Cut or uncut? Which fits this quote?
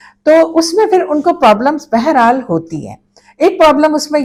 uncut